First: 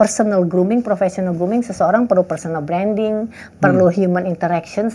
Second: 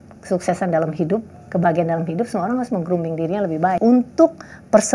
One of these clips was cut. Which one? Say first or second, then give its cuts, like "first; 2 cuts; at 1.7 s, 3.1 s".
second; 1 cut; at 3.7 s